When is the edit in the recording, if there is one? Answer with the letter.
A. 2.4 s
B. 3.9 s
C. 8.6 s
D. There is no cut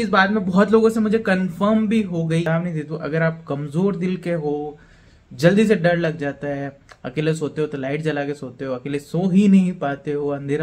A